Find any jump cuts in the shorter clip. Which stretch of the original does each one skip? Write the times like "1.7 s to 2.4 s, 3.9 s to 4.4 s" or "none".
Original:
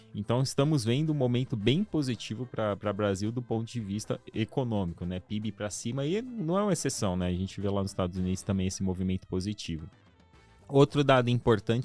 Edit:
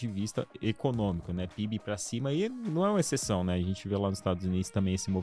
none